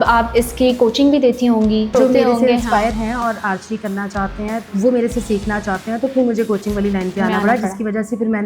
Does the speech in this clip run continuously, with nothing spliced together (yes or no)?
no